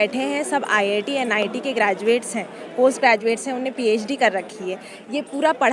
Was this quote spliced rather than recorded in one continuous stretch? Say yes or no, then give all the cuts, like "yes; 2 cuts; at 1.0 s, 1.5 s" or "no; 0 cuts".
no; 0 cuts